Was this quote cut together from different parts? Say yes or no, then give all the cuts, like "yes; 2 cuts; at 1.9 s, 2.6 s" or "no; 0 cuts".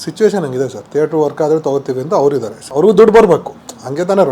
yes; 1 cut; at 2.6 s